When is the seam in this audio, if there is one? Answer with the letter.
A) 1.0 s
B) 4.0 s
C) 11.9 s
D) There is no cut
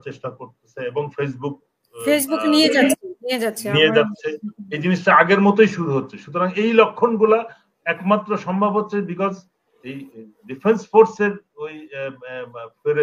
D